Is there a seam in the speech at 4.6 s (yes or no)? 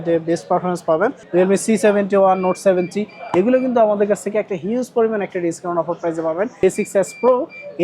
no